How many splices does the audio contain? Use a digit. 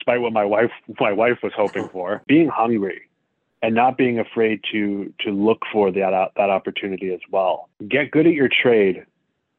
2